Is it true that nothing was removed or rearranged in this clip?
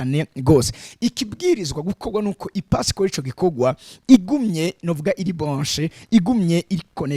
yes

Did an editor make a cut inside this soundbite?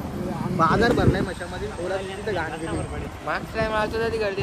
no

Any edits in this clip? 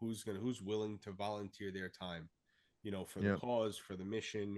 no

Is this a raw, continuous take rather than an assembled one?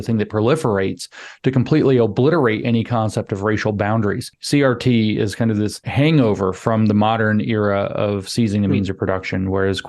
no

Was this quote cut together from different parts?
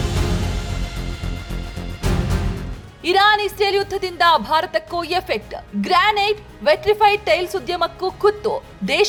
no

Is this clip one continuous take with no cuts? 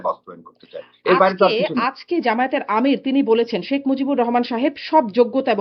yes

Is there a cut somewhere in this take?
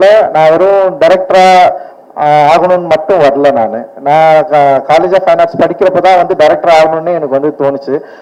no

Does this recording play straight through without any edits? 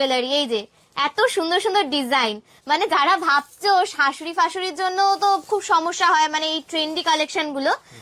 yes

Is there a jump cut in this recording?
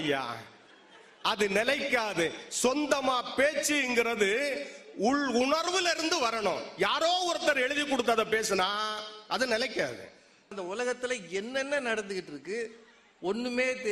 yes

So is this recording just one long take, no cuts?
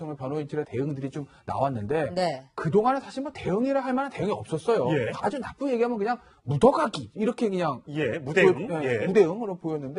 yes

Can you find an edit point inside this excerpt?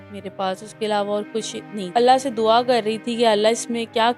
yes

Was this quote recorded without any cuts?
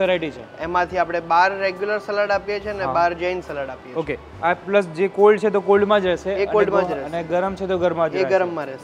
yes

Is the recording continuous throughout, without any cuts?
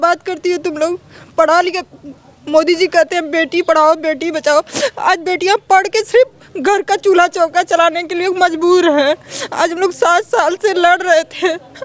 yes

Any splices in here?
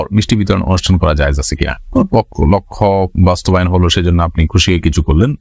no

